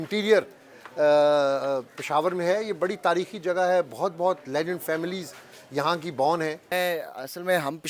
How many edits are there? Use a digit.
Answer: 1